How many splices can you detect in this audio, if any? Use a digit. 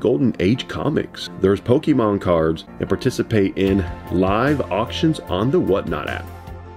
2